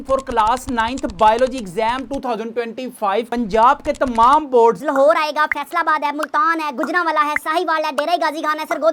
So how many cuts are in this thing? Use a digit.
0